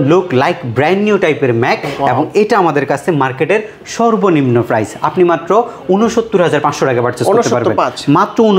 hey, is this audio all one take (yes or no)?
yes